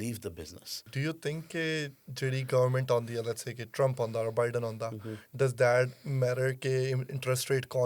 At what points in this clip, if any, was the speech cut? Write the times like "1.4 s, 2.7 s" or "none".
0.9 s